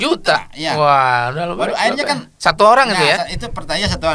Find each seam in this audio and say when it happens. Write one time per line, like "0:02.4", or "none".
none